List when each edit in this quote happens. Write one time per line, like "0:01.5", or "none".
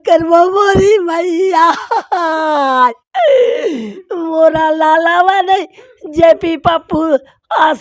none